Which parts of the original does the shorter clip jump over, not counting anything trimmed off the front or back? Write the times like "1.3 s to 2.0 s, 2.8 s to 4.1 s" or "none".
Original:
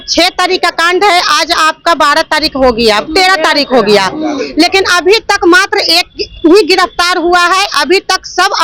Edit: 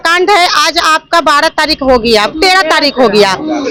none

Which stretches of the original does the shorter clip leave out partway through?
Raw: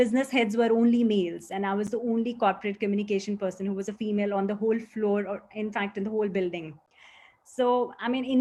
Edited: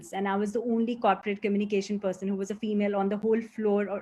none

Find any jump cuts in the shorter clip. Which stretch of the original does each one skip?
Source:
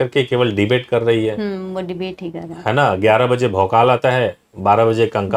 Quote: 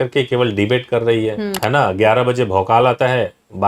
1.5 s to 2.6 s

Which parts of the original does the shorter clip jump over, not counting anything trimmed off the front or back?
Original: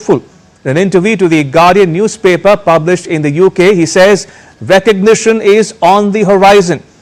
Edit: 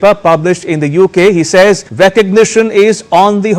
4.3 s to 4.6 s

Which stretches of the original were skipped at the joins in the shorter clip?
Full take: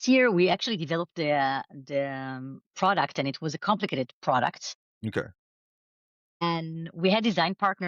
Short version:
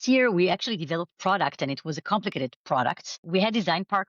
1.1 s to 2.7 s, 4.7 s to 6.8 s

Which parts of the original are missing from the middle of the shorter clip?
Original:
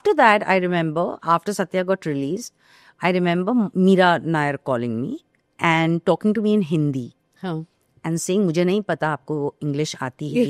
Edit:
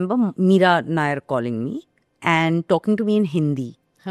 none

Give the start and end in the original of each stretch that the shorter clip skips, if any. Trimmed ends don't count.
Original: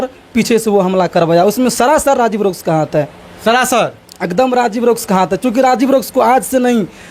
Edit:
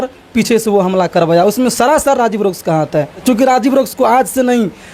3.2 s to 5.3 s

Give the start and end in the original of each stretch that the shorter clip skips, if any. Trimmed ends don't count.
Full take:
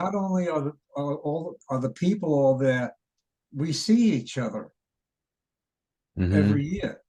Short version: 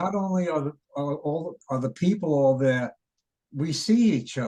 none

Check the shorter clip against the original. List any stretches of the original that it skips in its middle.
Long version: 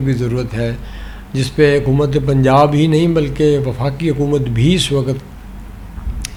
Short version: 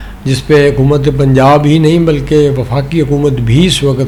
none

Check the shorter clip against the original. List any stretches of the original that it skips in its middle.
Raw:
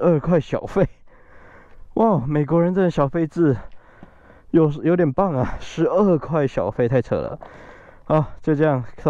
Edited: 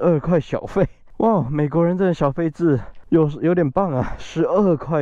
1.0 s to 1.8 s, 3.7 s to 4.4 s

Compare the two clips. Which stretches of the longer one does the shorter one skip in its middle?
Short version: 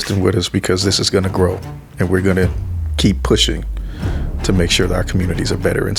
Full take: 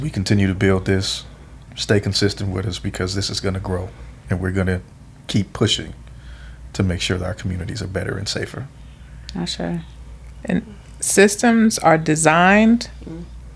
none

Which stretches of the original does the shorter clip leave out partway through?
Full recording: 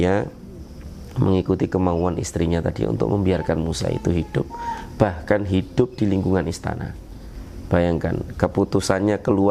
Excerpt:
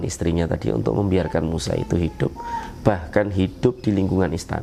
none

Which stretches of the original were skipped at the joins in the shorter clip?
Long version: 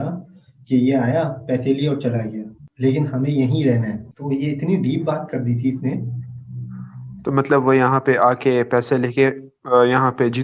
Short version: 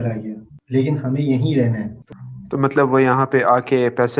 4.1 s to 6.8 s

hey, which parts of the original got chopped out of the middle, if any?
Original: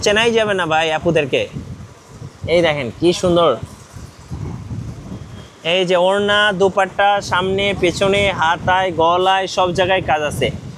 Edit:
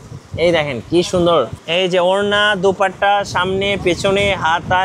3.7 s to 5.6 s

